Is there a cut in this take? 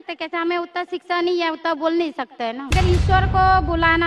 yes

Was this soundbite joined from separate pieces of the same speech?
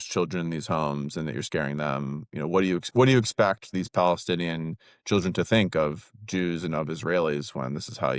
no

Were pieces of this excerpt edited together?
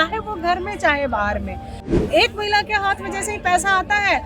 yes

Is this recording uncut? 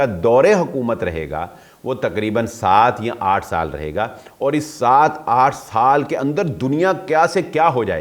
yes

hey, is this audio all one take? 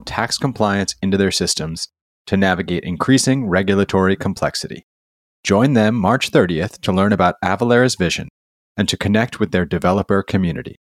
yes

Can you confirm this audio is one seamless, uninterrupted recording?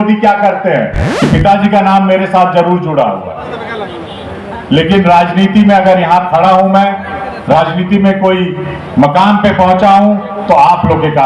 no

